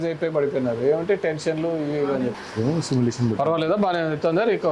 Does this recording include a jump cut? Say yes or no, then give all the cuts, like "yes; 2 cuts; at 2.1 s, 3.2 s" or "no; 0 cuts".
no; 0 cuts